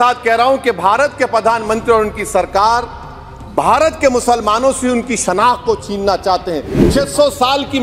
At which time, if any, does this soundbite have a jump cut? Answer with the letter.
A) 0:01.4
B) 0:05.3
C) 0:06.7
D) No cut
C